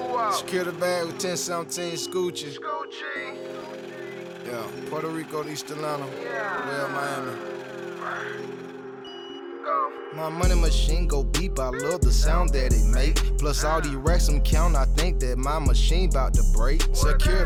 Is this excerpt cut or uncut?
uncut